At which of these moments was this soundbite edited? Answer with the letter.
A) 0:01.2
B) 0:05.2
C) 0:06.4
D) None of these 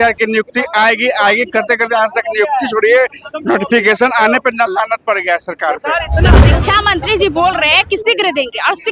C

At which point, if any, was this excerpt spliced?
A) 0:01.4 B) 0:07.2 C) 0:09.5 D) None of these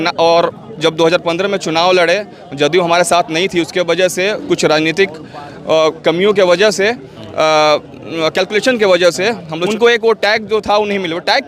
C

